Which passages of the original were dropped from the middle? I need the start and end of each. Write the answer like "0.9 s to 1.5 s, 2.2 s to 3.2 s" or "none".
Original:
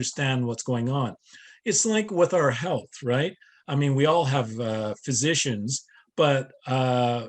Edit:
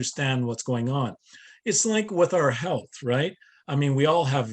none